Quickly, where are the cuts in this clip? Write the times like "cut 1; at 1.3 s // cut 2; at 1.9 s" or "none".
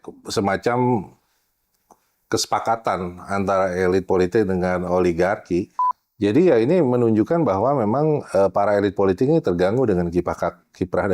cut 1; at 5.8 s